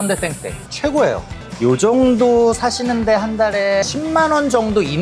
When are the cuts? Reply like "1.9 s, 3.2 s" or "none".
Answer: 1.4 s